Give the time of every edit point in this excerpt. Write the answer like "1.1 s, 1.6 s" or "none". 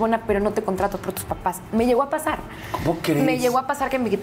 none